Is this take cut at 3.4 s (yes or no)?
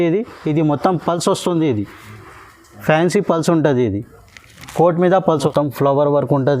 no